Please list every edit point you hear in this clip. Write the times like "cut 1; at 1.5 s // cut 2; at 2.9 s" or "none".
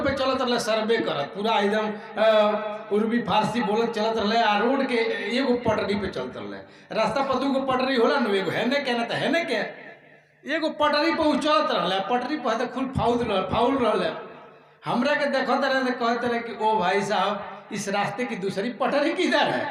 none